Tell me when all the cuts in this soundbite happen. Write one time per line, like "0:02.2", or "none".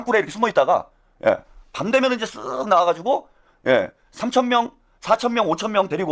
none

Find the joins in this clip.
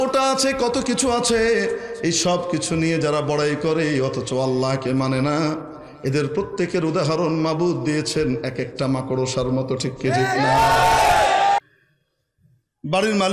0:11.6

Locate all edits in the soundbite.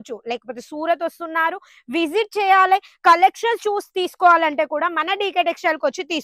none

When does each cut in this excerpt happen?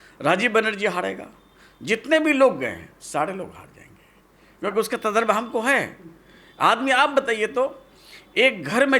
none

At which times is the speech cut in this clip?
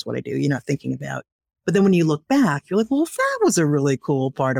none

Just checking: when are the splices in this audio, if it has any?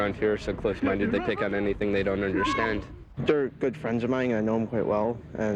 0:03.0

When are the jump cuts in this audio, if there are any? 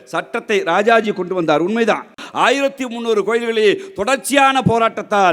0:02.2

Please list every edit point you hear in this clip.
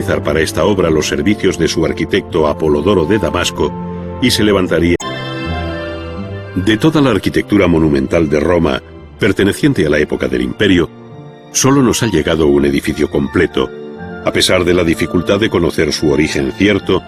none

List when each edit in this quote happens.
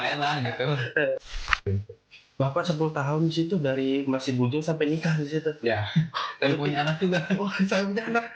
0:01.6

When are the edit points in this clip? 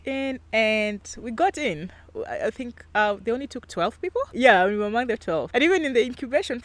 none

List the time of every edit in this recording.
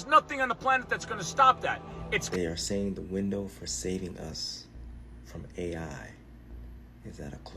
0:02.3

